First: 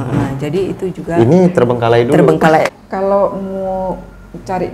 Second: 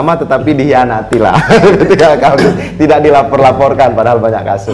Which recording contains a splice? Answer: first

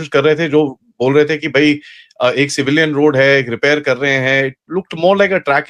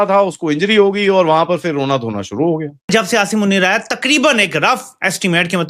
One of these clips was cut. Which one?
second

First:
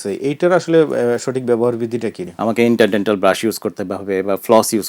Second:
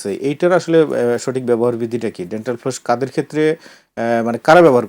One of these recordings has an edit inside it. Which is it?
first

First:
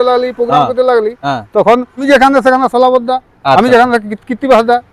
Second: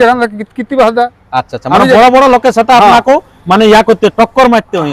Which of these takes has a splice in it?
first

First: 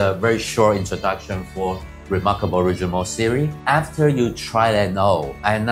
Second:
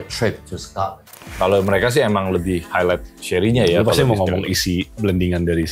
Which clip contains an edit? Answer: second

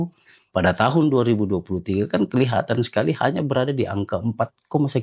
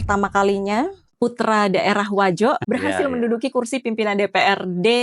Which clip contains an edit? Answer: second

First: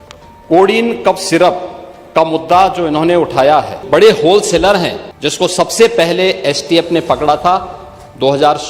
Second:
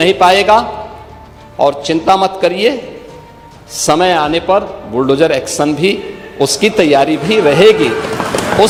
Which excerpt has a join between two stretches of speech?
first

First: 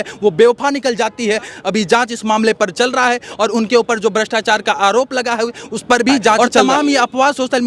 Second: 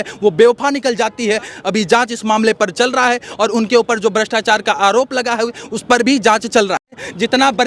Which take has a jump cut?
second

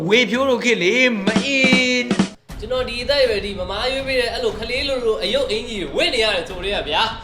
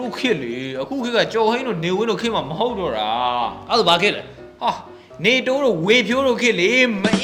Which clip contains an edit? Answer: first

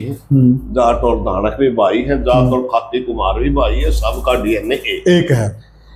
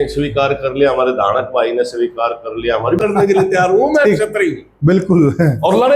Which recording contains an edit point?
second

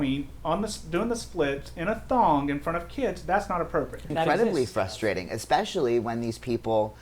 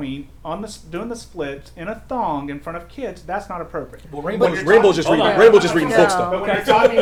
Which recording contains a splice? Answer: first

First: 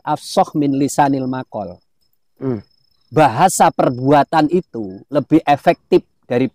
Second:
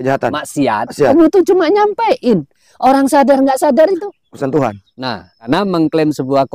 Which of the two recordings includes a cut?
second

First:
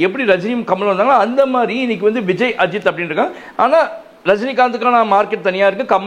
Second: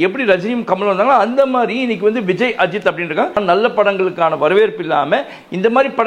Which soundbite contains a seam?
second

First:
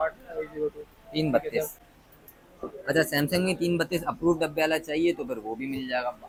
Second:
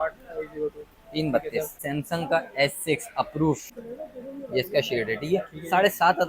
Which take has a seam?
second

